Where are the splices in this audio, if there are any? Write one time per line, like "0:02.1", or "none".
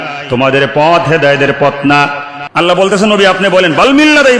0:02.3